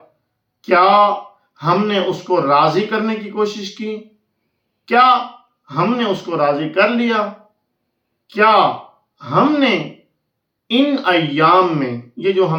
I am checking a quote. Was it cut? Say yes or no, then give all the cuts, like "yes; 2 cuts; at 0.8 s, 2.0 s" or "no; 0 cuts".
no; 0 cuts